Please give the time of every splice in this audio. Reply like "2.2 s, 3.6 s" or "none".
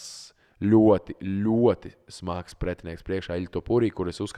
none